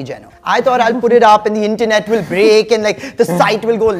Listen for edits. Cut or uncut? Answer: uncut